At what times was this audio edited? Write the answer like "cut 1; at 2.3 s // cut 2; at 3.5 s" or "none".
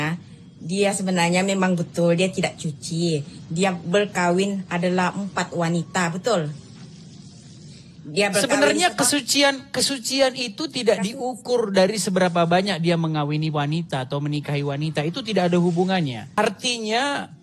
cut 1; at 16.3 s